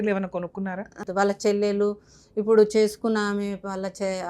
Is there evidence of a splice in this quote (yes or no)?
yes